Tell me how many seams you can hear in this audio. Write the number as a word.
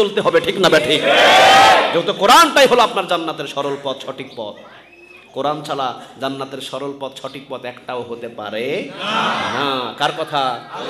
zero